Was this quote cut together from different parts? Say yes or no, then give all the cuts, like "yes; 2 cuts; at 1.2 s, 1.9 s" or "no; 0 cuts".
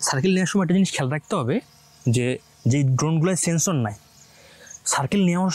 no; 0 cuts